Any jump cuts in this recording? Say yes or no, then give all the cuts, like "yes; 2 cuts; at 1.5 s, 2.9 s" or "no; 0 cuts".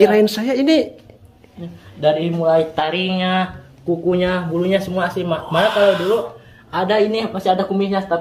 no; 0 cuts